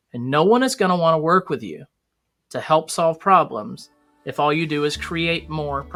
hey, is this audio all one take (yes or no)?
yes